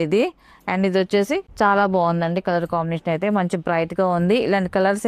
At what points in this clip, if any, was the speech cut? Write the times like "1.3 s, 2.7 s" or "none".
1.5 s